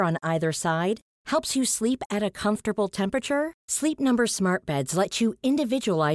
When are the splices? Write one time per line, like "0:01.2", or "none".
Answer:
none